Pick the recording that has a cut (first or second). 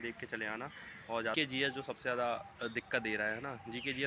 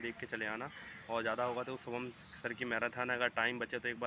first